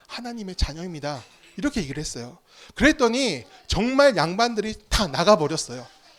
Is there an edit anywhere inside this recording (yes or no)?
no